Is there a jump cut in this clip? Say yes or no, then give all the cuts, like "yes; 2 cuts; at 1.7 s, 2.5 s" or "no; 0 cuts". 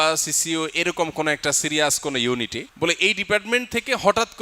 yes; 1 cut; at 2.6 s